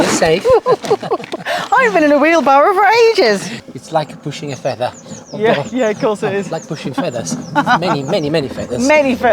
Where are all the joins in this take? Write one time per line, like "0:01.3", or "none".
0:03.6